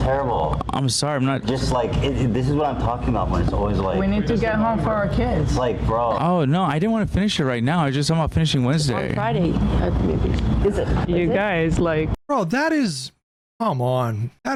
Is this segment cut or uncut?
uncut